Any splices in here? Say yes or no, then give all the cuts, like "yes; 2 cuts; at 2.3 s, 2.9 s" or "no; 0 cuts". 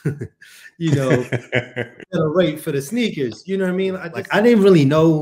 yes; 1 cut; at 4.0 s